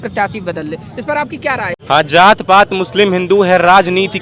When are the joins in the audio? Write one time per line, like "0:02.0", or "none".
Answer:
0:01.7